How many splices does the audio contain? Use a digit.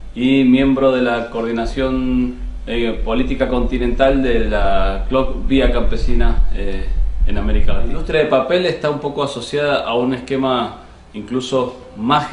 1